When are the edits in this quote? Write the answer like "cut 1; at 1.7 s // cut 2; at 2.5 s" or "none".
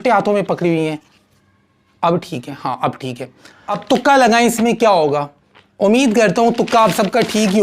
cut 1; at 3.7 s